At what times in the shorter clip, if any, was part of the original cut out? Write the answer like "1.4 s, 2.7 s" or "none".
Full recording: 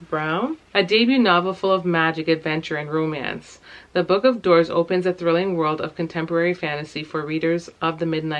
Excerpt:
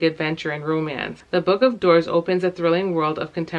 1.1 s